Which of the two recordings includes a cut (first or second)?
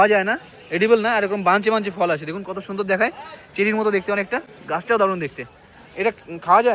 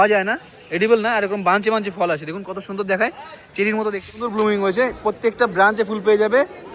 second